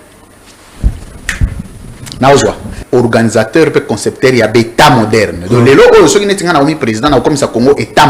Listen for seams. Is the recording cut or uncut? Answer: cut